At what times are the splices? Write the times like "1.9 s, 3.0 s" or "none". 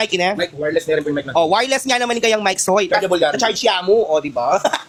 none